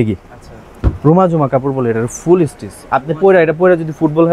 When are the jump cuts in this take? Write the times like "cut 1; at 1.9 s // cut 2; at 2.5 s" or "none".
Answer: none